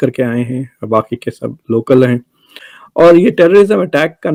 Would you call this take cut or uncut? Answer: uncut